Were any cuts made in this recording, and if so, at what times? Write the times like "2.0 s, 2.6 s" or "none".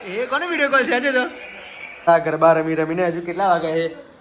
2.1 s